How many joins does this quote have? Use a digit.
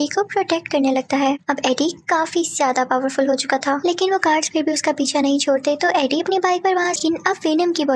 1